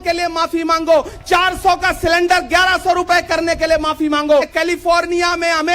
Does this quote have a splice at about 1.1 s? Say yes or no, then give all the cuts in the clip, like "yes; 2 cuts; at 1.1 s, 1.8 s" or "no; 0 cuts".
yes; 2 cuts; at 1.1 s, 4.5 s